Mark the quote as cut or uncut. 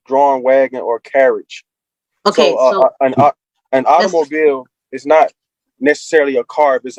uncut